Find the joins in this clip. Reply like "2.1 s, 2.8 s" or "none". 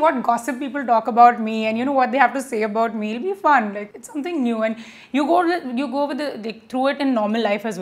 none